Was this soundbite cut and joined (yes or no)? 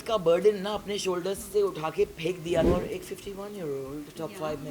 yes